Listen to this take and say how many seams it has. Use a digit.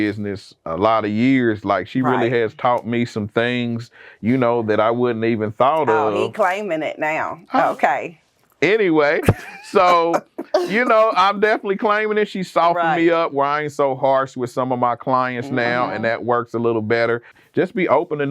1